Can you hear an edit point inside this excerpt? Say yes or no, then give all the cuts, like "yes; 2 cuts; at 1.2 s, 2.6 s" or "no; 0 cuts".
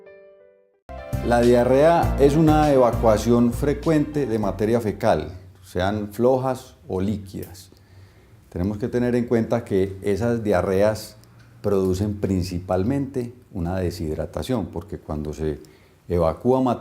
yes; 1 cut; at 1.1 s